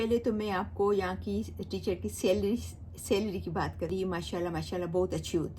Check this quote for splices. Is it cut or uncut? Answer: cut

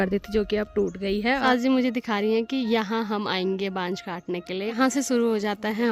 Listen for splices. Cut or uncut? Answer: cut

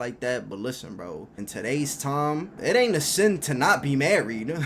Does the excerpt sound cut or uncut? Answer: cut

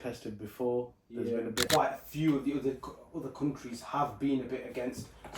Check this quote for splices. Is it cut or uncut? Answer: cut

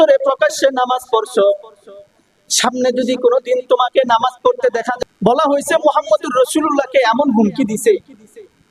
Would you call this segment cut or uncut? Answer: cut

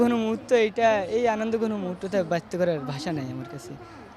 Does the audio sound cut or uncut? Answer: uncut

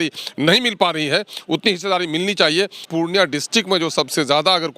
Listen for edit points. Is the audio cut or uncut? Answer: cut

